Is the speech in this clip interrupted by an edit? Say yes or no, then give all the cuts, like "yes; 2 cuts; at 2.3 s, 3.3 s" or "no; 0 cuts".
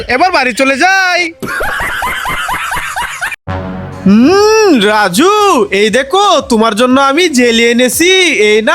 yes; 1 cut; at 3.0 s